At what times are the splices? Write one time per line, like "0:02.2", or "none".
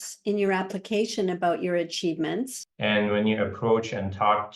0:02.6